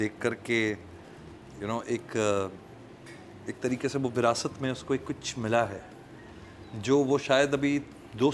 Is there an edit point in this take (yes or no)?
no